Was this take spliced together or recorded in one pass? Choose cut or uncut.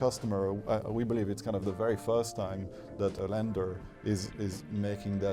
cut